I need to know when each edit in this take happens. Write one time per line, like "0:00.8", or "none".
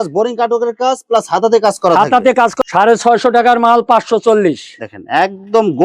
0:02.5